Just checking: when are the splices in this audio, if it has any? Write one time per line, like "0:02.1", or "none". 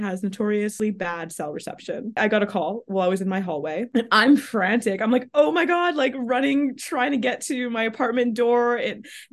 0:00.7
0:02.2